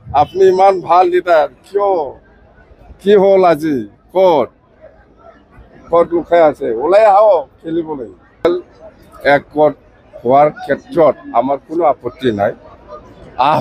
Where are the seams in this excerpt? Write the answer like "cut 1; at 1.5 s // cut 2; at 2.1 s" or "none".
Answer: cut 1; at 8.4 s